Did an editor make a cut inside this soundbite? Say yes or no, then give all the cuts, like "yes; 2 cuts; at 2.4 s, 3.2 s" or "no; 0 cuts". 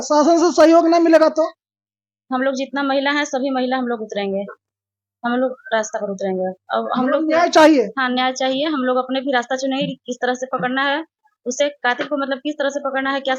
no; 0 cuts